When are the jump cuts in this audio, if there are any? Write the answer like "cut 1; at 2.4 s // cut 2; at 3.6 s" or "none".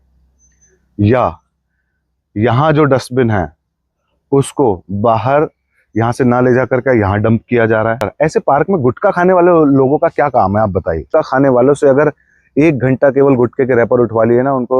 cut 1; at 8.1 s // cut 2; at 11.1 s